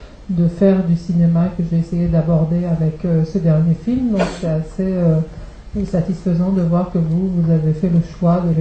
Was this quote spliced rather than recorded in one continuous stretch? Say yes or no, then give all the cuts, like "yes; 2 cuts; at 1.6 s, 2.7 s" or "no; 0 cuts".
no; 0 cuts